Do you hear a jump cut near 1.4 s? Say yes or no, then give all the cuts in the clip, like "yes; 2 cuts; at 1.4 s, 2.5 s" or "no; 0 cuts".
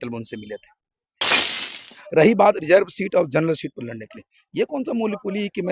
yes; 1 cut; at 1.4 s